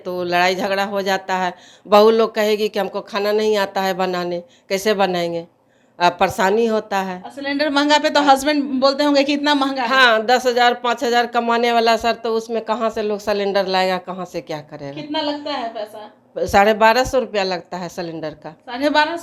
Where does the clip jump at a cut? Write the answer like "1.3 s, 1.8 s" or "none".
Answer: none